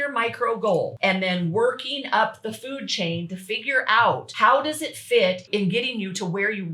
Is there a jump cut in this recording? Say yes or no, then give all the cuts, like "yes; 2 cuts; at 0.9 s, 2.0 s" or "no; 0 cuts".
yes; 3 cuts; at 0.9 s, 4.3 s, 5.4 s